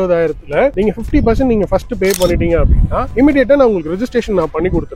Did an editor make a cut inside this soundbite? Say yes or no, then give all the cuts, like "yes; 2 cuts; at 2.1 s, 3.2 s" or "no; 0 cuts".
no; 0 cuts